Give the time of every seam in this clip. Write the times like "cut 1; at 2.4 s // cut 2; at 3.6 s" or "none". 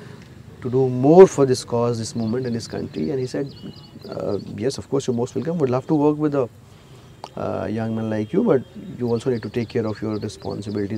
none